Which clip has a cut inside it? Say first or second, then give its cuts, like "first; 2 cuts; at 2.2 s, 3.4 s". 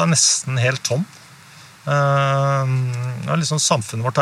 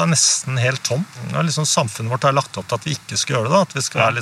second; 1 cut; at 1.2 s